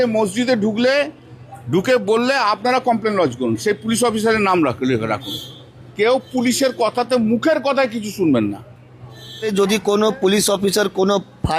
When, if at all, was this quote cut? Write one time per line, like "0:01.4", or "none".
0:05.8
0:09.5